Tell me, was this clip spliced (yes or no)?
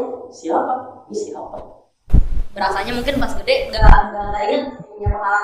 yes